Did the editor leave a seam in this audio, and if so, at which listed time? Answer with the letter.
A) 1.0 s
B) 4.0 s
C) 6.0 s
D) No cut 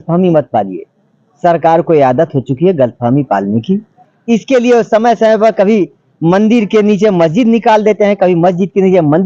B